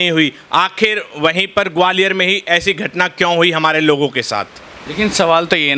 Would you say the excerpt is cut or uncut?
uncut